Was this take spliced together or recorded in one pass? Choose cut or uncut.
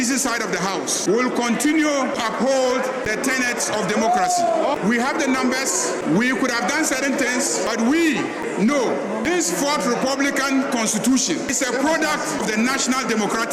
cut